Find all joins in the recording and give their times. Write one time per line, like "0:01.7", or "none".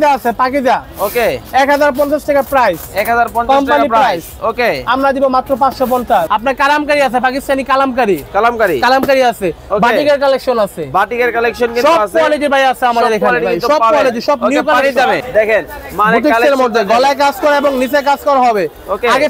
0:06.3
0:15.2